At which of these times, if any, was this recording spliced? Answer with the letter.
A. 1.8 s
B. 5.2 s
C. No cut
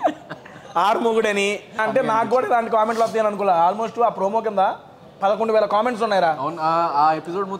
A